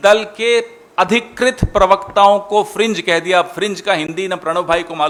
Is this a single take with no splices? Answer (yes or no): yes